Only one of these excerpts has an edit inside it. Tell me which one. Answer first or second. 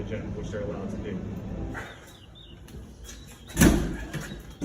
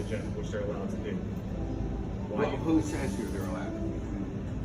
first